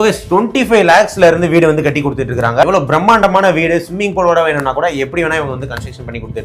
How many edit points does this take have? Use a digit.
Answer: 1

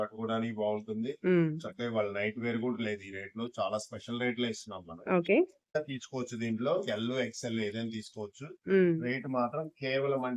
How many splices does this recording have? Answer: 1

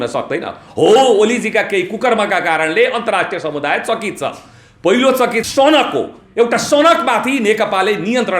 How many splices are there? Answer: 1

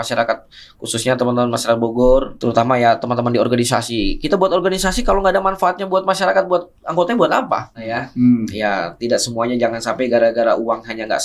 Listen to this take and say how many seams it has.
2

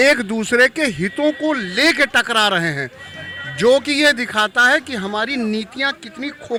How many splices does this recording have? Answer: 0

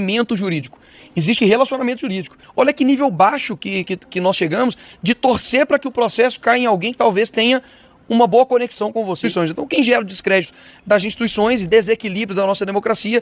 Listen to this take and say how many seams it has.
2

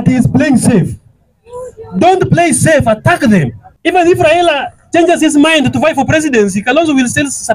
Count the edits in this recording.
1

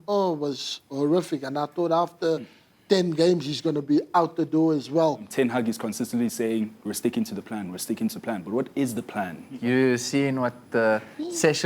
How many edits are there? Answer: 2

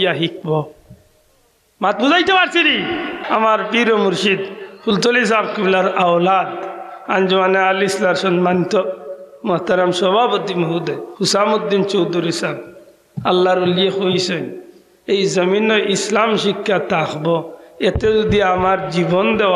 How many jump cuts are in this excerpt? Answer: 2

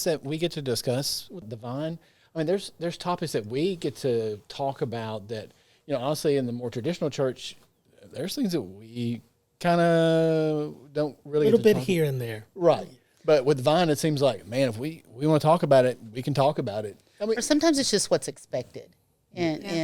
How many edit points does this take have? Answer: 1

